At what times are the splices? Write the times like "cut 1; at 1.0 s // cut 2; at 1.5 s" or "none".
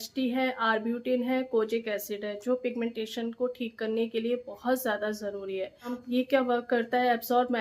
cut 1; at 6.0 s